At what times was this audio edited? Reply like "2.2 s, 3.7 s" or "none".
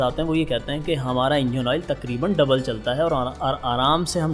none